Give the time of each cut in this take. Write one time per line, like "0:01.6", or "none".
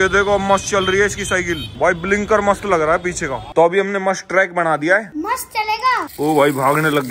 0:03.5
0:05.1